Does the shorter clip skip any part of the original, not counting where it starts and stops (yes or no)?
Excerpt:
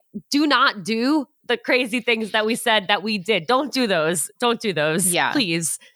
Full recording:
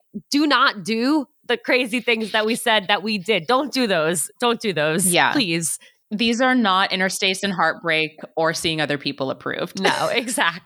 no